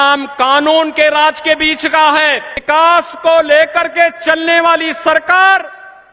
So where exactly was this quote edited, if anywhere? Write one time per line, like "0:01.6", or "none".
0:02.5

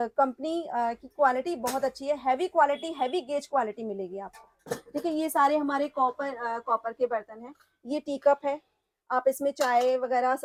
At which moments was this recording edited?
none

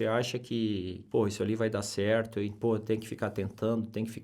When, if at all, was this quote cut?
0:01.0
0:02.5

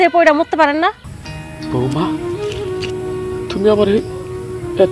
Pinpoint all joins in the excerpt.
none

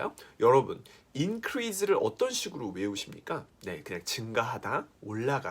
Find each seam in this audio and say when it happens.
0:03.5

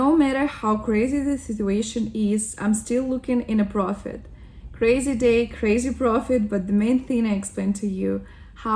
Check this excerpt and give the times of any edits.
none

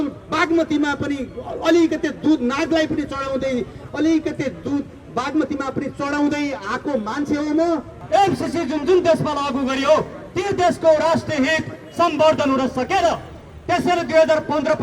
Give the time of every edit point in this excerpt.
0:07.9

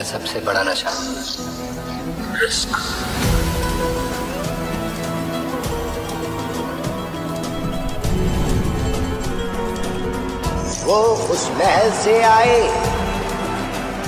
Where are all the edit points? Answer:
0:02.2

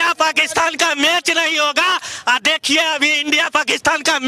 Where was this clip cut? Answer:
none

